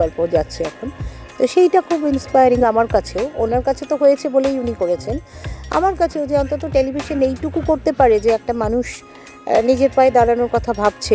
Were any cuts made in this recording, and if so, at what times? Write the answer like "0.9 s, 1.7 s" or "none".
none